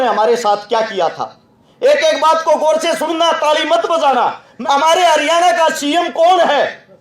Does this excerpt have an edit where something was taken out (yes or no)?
yes